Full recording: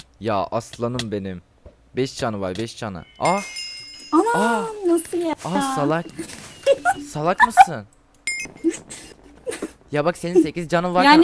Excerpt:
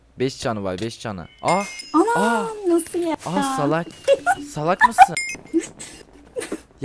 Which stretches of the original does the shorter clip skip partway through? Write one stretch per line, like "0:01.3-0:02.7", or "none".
0:03.5-0:04.0
0:06.1-0:06.5
0:07.9-0:08.4